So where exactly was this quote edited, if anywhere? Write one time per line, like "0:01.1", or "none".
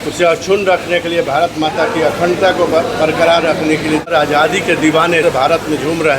0:04.1
0:05.2